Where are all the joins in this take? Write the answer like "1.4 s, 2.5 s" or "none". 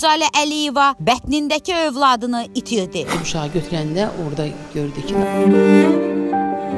none